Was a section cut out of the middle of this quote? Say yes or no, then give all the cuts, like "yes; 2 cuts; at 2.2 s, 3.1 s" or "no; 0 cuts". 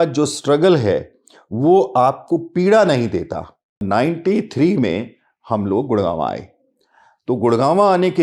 yes; 1 cut; at 3.8 s